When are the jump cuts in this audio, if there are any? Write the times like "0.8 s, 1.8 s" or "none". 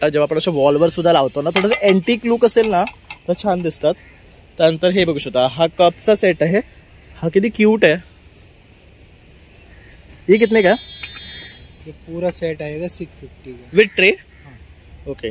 none